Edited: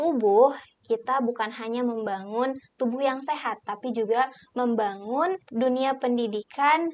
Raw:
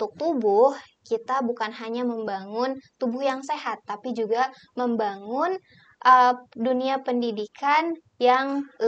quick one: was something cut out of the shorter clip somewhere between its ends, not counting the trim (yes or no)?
yes